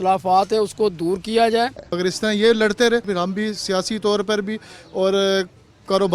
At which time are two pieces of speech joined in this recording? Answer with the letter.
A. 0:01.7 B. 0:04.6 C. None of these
A